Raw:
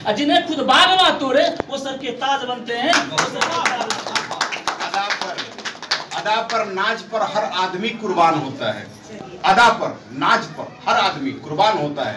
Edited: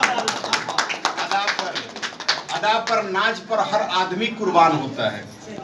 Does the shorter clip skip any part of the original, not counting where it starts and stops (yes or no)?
no